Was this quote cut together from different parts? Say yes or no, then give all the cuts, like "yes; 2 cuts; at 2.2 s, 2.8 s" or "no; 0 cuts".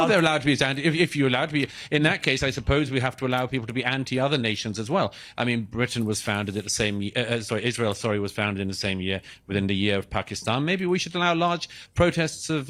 no; 0 cuts